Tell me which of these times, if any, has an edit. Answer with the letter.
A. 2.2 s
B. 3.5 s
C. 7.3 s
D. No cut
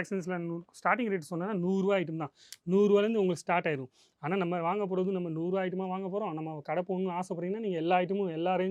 D